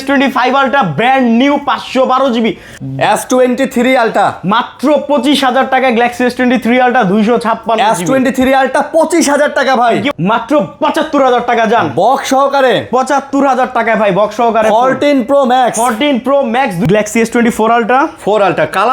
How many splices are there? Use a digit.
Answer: 3